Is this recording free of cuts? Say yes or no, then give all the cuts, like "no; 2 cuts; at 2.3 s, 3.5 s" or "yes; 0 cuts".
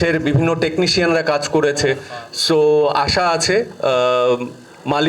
yes; 0 cuts